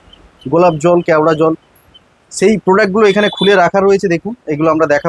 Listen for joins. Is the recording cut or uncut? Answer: uncut